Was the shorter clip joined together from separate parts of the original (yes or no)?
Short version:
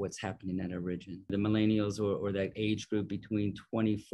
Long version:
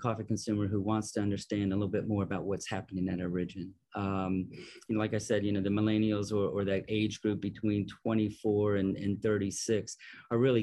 yes